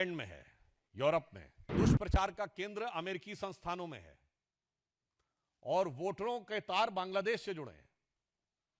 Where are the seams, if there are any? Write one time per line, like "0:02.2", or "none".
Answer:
0:01.7